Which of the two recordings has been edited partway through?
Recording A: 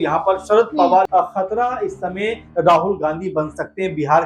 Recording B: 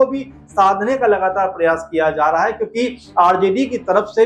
A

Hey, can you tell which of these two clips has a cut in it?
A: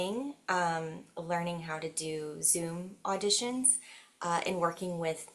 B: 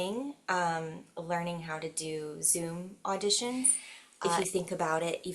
B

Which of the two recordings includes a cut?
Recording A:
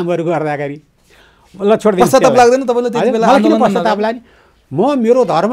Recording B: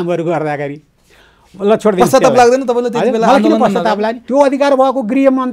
B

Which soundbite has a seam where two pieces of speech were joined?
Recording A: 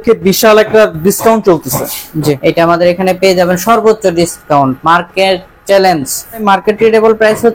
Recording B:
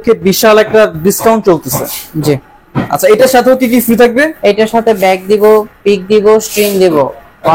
A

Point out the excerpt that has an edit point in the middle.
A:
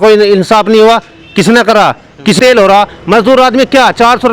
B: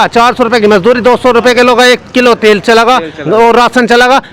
A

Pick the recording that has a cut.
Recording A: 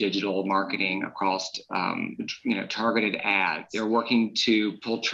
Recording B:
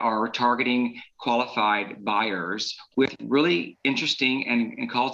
A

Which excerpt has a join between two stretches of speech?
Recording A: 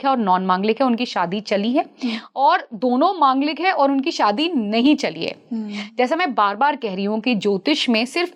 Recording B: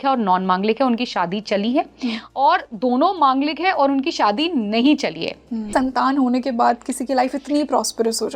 B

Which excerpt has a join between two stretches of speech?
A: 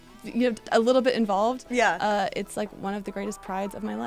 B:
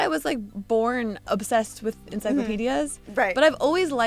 B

